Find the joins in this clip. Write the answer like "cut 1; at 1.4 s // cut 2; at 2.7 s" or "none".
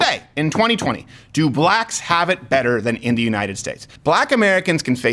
cut 1; at 3.9 s

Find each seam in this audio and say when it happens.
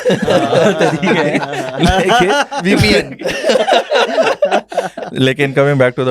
none

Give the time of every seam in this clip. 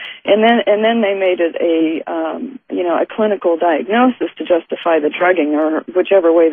cut 1; at 1.4 s

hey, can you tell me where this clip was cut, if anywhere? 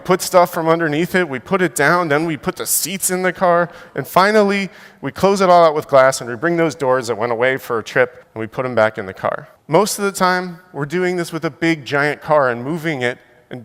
cut 1; at 9.5 s

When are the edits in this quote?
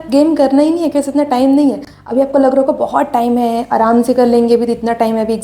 none

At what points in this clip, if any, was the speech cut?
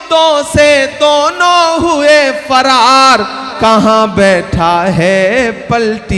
none

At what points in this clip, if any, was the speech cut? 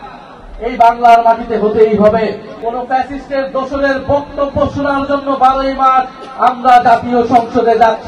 cut 1; at 2.5 s

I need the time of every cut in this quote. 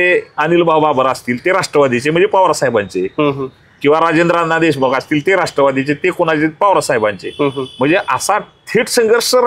none

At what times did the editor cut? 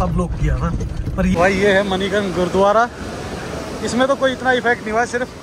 cut 1; at 1.3 s

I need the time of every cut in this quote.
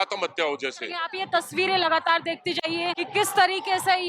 cut 1; at 1.1 s // cut 2; at 3.0 s

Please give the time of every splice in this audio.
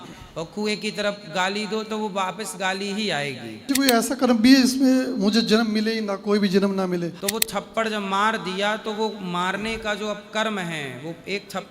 cut 1; at 3.7 s // cut 2; at 7.2 s

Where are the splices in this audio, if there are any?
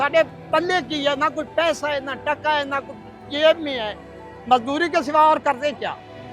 none

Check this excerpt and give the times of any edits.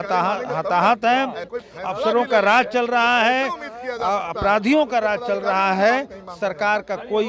cut 1; at 1.5 s

